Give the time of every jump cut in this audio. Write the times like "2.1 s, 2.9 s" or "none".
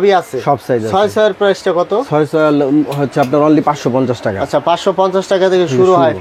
none